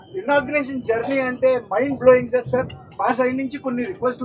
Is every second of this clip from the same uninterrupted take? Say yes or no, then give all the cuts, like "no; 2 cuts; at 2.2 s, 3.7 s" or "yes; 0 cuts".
yes; 0 cuts